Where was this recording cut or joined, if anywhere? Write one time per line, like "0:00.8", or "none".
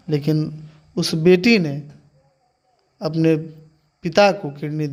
none